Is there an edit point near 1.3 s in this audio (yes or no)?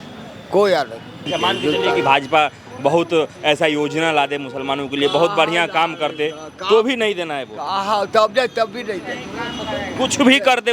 yes